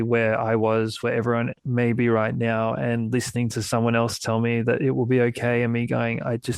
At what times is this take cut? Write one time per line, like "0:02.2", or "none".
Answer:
none